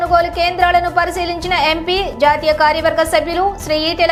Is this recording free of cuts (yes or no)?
yes